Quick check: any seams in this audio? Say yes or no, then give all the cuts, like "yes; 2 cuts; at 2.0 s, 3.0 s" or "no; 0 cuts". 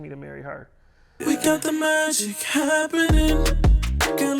yes; 1 cut; at 1.0 s